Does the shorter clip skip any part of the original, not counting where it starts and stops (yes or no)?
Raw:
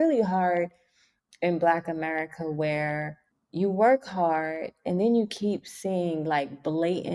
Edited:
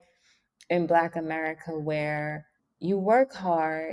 no